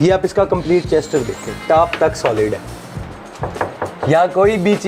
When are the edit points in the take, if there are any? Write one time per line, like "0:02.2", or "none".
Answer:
0:01.6